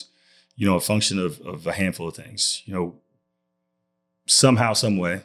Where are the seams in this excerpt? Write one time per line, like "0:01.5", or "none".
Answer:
none